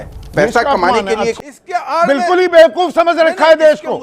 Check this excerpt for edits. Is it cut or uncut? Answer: cut